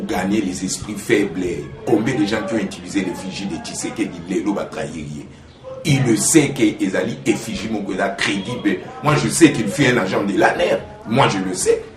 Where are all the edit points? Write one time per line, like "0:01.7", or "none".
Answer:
0:08.9